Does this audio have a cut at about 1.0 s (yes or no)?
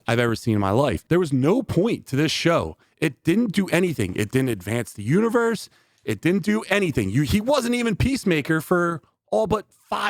yes